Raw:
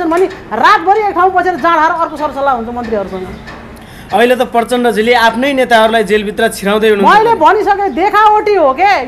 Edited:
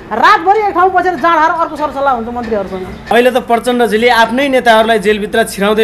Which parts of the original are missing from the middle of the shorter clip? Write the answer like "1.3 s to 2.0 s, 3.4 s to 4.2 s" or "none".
3.5 s to 4.2 s